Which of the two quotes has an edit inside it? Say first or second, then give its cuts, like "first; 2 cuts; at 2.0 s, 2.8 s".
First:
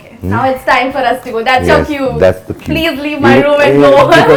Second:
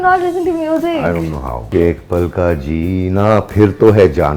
second; 1 cut; at 1.7 s